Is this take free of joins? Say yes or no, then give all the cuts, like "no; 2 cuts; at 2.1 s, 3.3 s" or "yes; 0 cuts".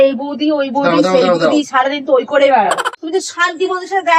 no; 1 cut; at 2.9 s